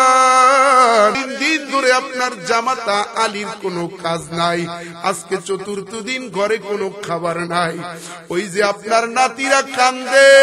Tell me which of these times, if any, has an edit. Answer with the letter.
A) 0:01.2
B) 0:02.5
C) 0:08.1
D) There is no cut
A